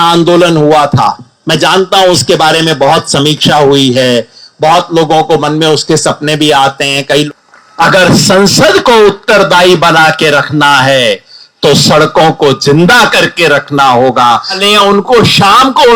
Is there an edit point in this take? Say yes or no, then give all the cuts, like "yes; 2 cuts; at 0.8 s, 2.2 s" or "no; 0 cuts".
yes; 2 cuts; at 7.3 s, 14.6 s